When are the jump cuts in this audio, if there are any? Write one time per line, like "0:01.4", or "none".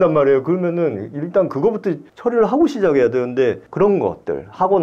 0:02.1
0:03.6